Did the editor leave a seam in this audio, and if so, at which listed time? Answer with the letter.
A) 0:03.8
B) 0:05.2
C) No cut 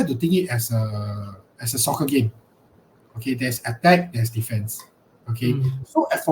C